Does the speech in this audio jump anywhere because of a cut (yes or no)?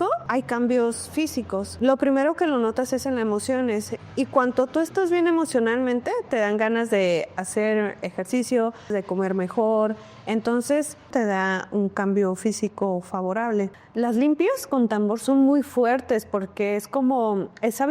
yes